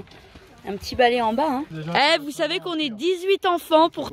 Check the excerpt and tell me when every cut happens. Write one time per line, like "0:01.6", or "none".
0:01.8